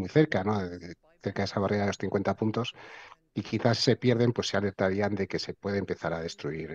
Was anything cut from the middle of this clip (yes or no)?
no